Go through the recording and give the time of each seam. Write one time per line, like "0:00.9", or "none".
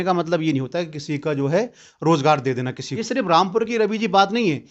0:02.8